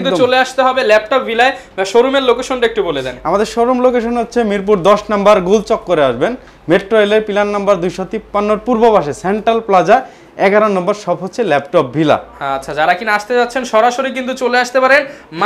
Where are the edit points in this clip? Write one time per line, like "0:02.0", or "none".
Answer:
none